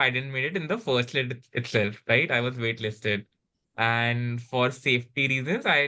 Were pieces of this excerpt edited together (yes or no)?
no